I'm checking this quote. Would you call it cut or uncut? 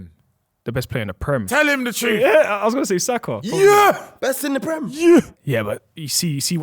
cut